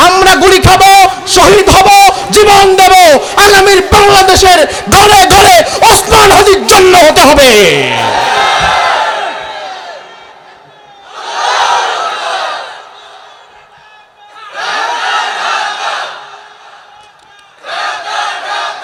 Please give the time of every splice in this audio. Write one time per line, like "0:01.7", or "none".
none